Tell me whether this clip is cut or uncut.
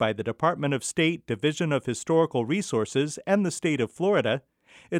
uncut